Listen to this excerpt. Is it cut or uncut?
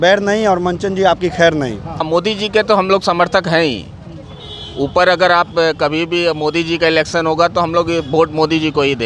cut